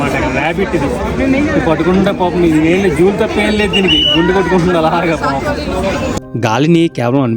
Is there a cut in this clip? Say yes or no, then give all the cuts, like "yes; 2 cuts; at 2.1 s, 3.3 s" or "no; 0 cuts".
yes; 1 cut; at 6.2 s